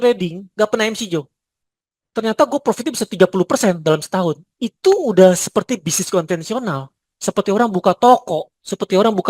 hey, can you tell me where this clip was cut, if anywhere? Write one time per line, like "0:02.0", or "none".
none